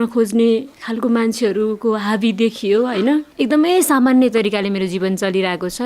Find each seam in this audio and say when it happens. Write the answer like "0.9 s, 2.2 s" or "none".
3.3 s